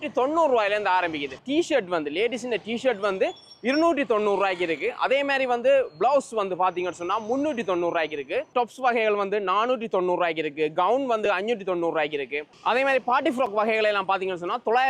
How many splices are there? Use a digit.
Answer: 0